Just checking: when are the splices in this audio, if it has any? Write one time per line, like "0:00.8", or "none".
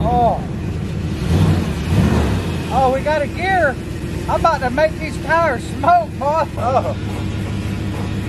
0:06.6